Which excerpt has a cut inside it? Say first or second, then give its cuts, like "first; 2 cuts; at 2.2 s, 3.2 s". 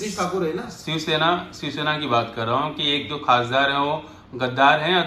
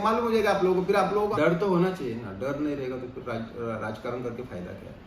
second; 1 cut; at 1.3 s